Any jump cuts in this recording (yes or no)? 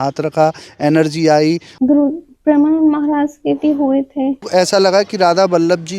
yes